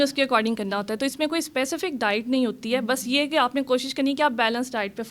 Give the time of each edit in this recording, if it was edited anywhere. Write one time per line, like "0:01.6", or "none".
none